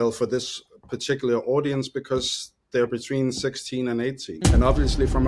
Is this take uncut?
no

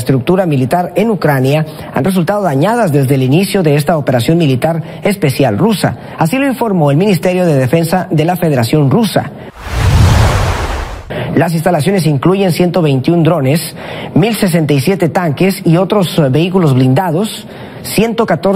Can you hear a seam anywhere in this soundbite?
no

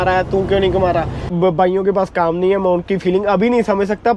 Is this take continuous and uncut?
no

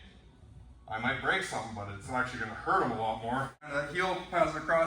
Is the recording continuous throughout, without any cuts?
no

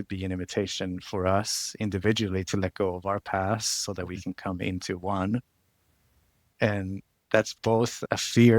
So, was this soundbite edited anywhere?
yes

